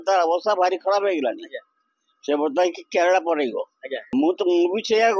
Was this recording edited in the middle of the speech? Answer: yes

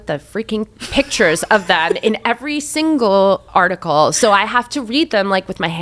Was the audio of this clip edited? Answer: no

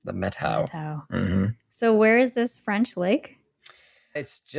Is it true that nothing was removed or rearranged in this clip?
yes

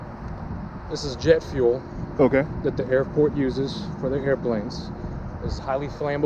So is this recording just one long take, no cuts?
yes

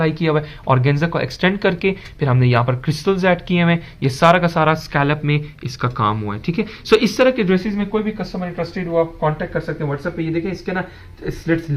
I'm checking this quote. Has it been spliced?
no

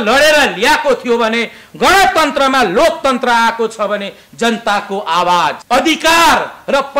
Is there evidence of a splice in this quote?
yes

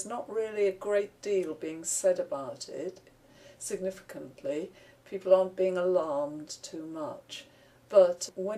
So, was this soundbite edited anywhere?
no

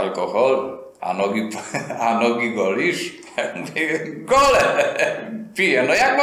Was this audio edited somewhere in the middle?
no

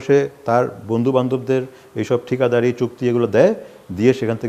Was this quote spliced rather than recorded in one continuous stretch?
no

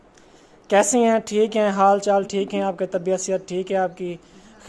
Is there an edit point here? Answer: no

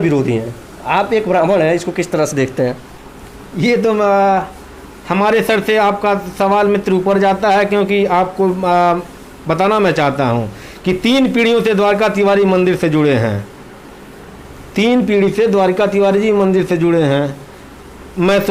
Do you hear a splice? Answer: no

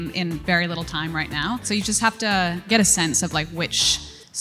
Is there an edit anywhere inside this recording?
yes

